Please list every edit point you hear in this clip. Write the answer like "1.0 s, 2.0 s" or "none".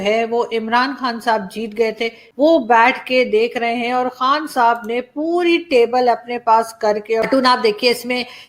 2.2 s, 7.2 s

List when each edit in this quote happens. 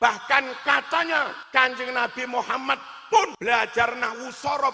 1.4 s, 3.3 s

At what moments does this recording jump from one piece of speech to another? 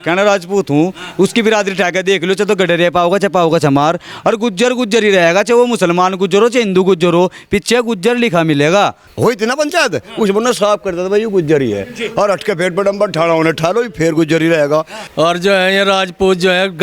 9.0 s, 15.0 s

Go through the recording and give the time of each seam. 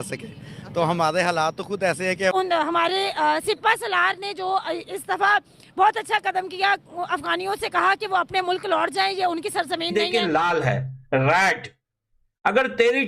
2.4 s, 9.9 s

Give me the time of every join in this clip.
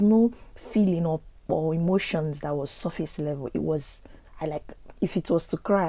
none

